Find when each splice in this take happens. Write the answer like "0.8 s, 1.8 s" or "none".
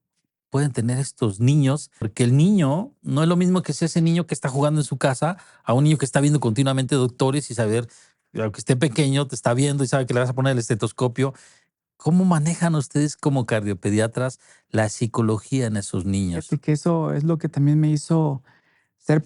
2.1 s